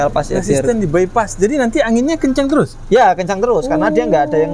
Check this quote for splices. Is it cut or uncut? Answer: uncut